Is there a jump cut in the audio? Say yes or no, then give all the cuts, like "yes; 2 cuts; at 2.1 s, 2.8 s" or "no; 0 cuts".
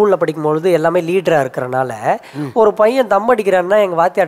no; 0 cuts